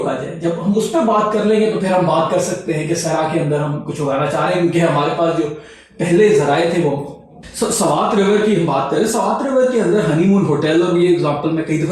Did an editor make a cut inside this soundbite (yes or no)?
yes